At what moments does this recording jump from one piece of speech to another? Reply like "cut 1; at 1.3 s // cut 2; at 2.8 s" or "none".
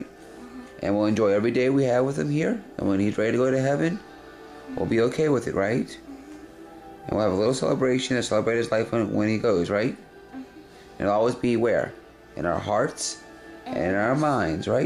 none